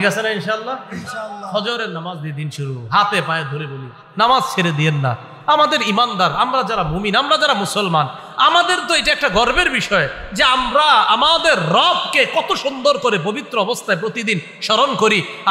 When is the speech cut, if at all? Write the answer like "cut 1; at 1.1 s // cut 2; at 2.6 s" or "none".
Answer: none

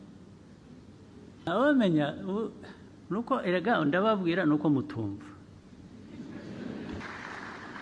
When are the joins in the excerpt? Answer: cut 1; at 1.5 s // cut 2; at 7.0 s

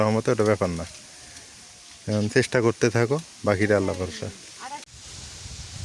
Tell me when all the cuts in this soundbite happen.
cut 1; at 4.9 s

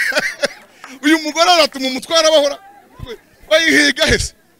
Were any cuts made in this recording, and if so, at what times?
none

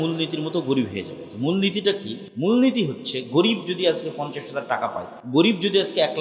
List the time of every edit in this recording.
cut 1; at 2.2 s // cut 2; at 5.1 s

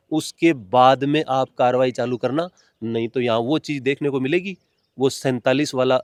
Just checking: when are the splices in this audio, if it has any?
none

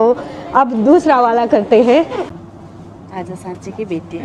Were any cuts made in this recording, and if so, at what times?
cut 1; at 2.3 s

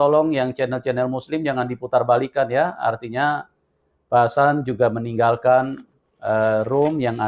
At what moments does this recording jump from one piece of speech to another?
none

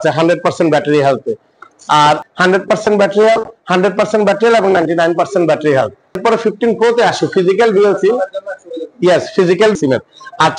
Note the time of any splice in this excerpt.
cut 1; at 2.2 s // cut 2; at 6.2 s // cut 3; at 9.7 s

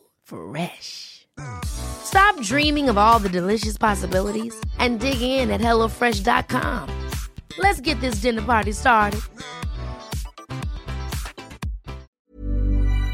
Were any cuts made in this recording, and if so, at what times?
cut 1; at 12.1 s

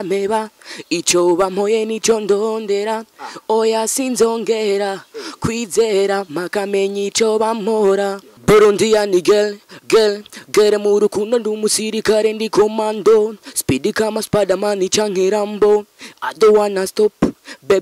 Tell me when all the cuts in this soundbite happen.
cut 1; at 8.3 s

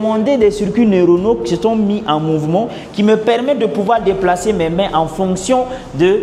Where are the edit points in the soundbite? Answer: none

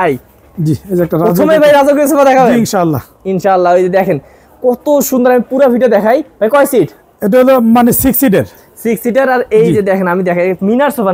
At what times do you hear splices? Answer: none

